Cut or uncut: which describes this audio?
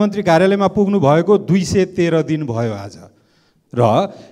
uncut